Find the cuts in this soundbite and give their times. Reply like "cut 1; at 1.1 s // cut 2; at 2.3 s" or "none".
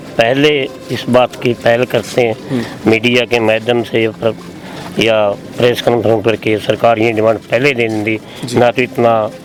none

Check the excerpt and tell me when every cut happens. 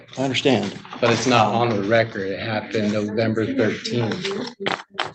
none

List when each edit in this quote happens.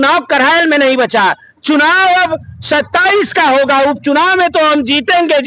none

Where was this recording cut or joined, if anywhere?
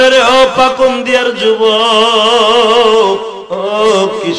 cut 1; at 3.4 s

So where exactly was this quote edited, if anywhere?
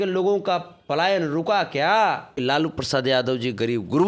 cut 1; at 2.3 s

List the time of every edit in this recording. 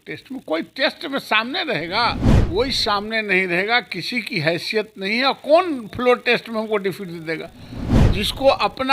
cut 1; at 2.3 s

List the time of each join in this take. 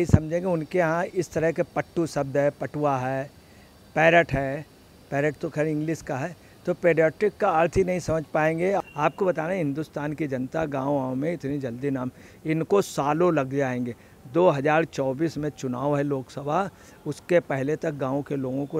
cut 1; at 8.8 s

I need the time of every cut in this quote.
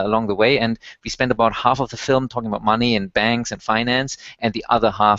none

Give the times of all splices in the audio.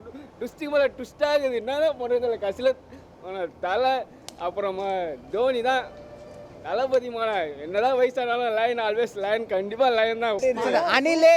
cut 1; at 10.4 s

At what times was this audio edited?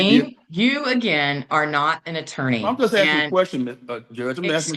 none

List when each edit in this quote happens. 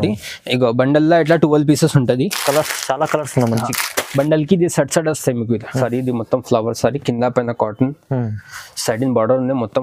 cut 1; at 5.8 s

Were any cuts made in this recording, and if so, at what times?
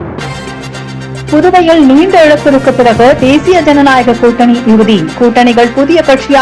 cut 1; at 1.0 s

